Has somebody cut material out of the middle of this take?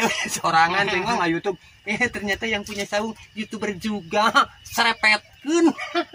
no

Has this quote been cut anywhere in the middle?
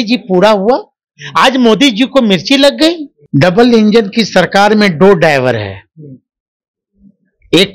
yes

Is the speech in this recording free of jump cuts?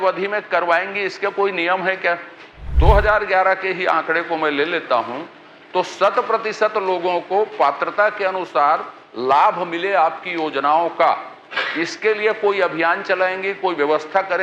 no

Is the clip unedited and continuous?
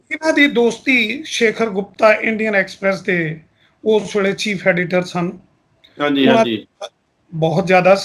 yes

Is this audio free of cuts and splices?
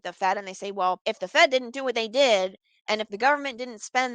no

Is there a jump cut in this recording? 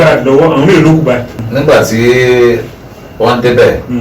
yes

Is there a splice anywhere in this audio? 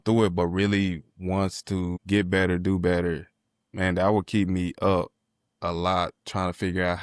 yes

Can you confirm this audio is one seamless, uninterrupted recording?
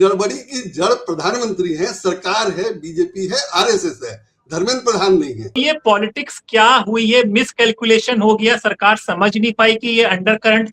no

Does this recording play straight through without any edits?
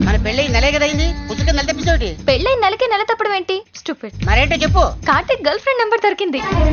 yes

